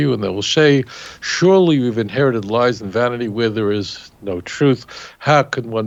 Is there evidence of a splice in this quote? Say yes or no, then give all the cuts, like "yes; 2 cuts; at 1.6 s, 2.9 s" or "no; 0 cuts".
no; 0 cuts